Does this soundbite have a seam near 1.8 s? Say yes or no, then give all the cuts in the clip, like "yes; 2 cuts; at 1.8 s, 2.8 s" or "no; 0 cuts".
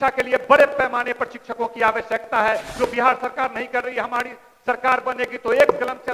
no; 0 cuts